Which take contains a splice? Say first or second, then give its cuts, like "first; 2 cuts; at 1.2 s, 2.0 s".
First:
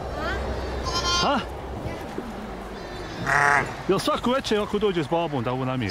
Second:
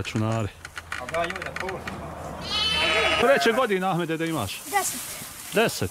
second; 1 cut; at 3.2 s